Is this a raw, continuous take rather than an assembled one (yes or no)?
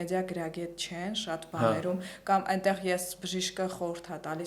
yes